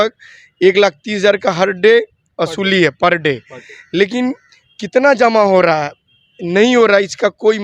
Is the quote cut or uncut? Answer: uncut